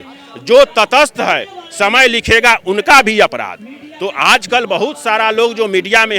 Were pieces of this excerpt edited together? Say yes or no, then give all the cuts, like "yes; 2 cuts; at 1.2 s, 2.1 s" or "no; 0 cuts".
no; 0 cuts